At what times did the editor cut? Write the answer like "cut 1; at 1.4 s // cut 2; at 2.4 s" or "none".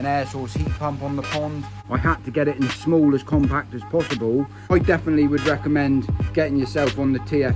cut 1; at 1.8 s // cut 2; at 4.6 s